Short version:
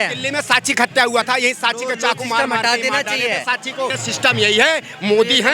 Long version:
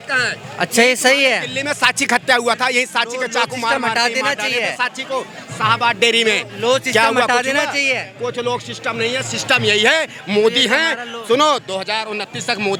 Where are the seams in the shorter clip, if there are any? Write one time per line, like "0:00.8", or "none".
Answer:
0:04.0